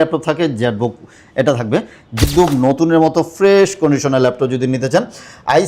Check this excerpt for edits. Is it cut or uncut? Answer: cut